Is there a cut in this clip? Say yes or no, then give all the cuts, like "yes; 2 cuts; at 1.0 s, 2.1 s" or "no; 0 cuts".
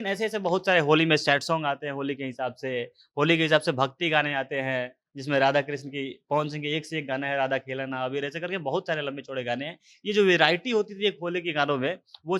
no; 0 cuts